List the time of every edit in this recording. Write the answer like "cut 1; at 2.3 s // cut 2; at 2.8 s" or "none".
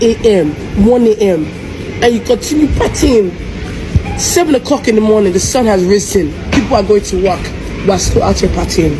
none